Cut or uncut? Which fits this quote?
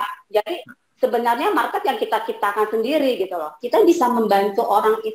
cut